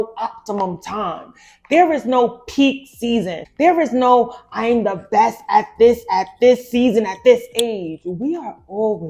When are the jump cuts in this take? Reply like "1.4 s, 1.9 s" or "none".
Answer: 3.4 s